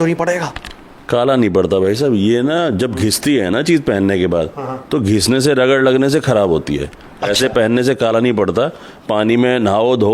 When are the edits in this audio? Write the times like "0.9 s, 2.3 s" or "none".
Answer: none